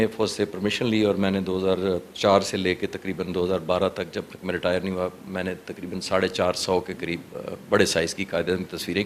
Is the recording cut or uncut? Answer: uncut